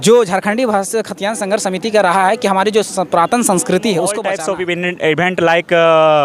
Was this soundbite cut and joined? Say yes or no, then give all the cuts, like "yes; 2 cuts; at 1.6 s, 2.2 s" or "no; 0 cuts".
yes; 1 cut; at 4.3 s